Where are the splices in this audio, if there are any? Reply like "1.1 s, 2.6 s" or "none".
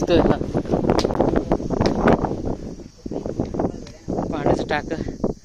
none